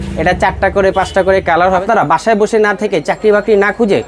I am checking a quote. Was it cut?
yes; 1 cut; at 1.8 s

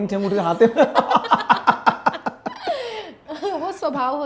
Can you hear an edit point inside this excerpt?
no; 0 cuts

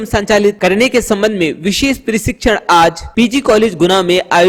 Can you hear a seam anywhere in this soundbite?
no; 0 cuts

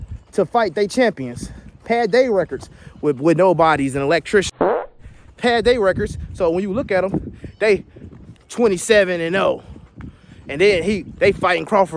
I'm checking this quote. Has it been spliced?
yes; 1 cut; at 4.8 s

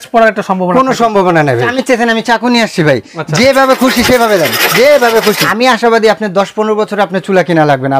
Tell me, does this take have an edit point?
yes; 2 cuts; at 1.7 s, 5.5 s

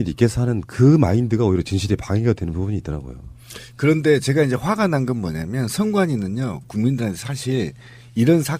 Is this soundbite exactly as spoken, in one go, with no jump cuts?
no; 1 cut; at 6.2 s

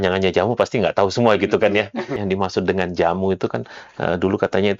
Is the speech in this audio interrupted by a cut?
yes; 1 cut; at 2.2 s

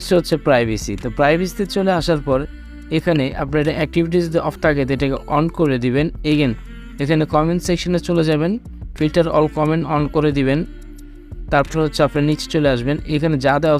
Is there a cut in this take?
no; 0 cuts

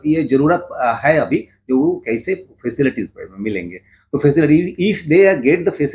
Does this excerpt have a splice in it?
no; 0 cuts

